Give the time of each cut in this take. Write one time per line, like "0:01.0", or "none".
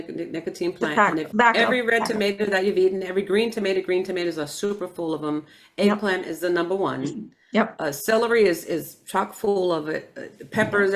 0:01.3